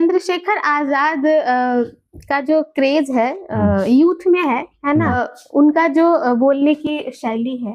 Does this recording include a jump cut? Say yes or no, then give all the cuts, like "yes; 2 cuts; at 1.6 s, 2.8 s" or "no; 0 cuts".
yes; 1 cut; at 5.2 s